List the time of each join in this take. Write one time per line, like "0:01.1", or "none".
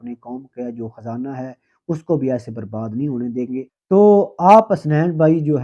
0:03.8